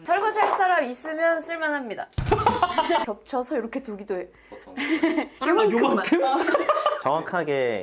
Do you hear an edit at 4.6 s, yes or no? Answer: no